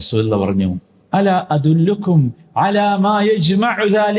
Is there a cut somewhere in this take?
yes; 1 cut; at 0.9 s

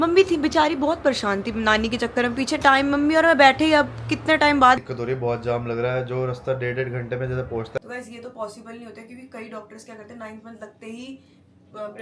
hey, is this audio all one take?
no; 2 cuts; at 4.8 s, 7.8 s

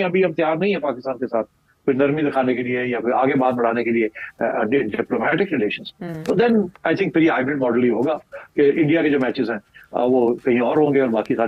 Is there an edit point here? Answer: no; 0 cuts

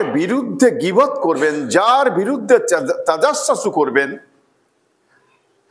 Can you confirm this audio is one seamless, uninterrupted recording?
yes; 0 cuts

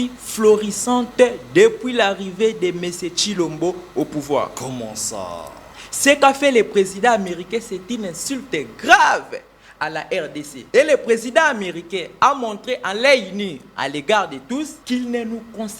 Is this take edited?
yes; 2 cuts; at 10.5 s, 14.8 s

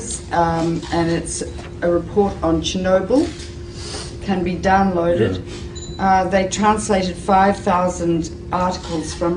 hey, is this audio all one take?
yes; 0 cuts

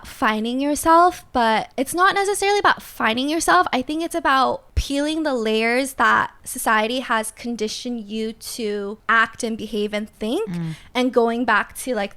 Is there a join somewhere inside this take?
yes; 4 cuts; at 1.7 s, 4.7 s, 6.4 s, 9.0 s

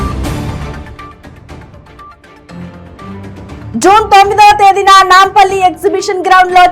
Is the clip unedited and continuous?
yes; 0 cuts

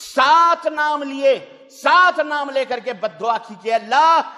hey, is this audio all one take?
yes; 0 cuts

